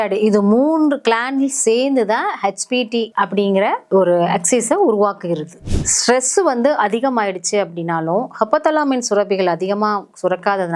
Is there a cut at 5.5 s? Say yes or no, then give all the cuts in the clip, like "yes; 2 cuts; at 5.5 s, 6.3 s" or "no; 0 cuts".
yes; 1 cut; at 5.5 s